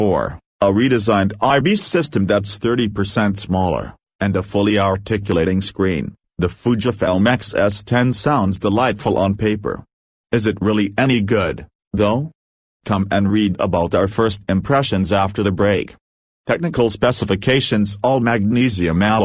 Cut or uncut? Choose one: cut